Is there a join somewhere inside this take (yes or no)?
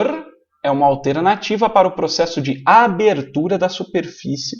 no